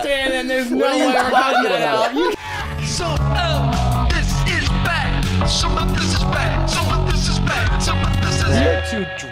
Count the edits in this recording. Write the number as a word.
one